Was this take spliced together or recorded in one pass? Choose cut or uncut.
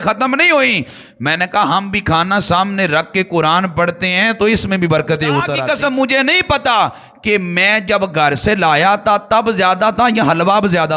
cut